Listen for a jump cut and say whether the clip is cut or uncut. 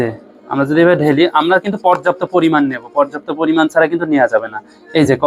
uncut